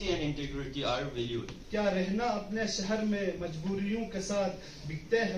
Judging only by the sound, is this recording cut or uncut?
cut